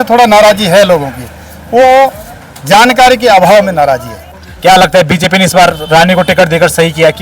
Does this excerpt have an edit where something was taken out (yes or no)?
yes